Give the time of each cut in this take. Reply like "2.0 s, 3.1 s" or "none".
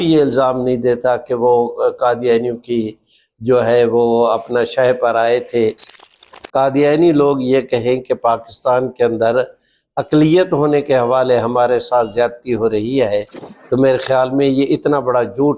6.1 s